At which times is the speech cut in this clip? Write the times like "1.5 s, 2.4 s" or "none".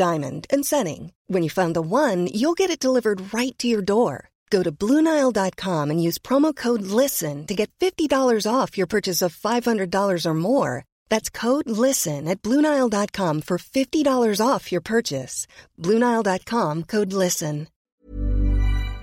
17.8 s